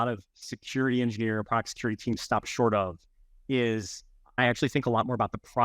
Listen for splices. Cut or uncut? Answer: cut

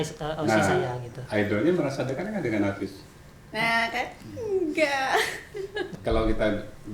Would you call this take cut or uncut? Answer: cut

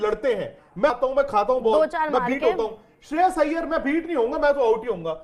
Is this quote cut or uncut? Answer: uncut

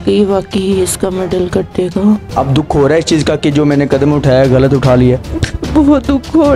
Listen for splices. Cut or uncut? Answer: cut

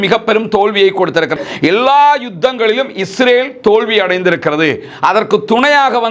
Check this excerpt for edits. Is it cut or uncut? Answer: cut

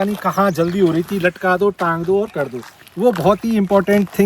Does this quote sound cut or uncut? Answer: uncut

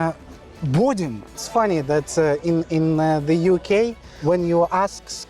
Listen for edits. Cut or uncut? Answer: cut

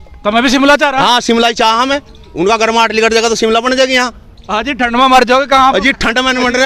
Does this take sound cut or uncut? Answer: uncut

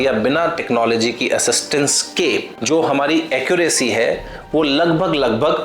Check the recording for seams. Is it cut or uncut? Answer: uncut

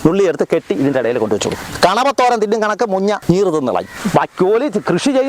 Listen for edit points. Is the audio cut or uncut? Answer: cut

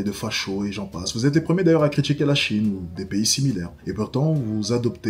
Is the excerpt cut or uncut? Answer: cut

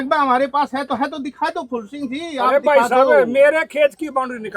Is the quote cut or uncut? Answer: uncut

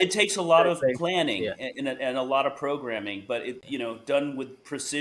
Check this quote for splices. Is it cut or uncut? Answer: cut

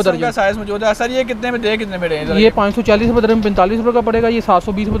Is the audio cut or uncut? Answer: uncut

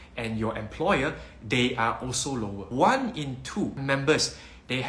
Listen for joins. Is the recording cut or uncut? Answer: cut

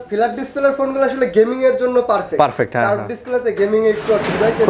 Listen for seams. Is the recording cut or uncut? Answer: uncut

